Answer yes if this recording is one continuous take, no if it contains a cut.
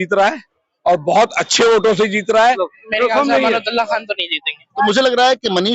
no